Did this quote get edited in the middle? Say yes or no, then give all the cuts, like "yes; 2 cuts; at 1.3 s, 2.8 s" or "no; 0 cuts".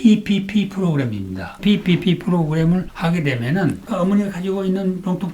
yes; 2 cuts; at 1.6 s, 3.9 s